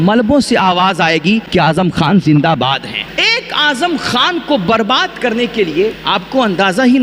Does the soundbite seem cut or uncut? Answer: cut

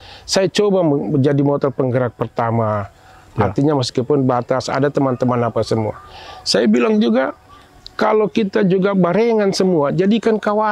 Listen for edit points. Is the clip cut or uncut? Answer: uncut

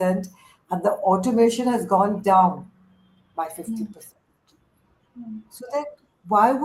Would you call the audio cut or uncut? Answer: uncut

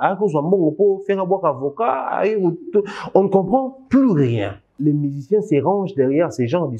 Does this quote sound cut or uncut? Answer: cut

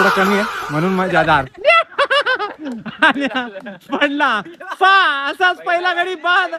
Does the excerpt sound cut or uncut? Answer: uncut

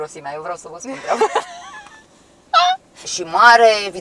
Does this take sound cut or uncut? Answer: cut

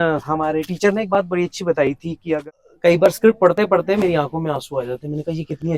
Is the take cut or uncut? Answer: cut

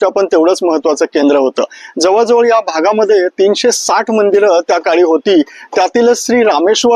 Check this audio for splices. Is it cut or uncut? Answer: uncut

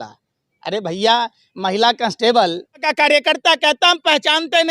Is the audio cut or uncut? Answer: cut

